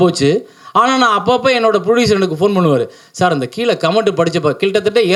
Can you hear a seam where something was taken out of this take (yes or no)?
no